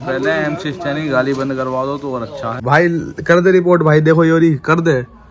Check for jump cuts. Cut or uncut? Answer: cut